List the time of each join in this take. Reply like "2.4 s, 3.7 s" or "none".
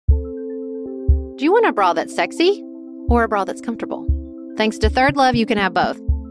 1.2 s